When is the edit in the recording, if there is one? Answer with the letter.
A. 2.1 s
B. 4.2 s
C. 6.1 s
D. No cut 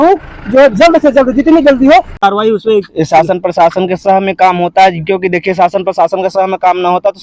A